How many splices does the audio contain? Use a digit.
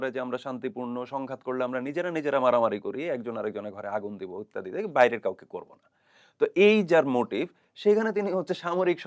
0